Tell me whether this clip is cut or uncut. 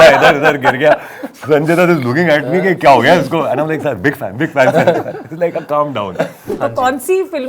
cut